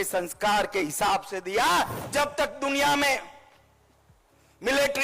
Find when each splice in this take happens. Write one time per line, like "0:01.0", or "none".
0:02.0